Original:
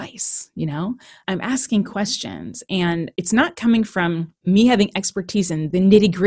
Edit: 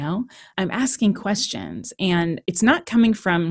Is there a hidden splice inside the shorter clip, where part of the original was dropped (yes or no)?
no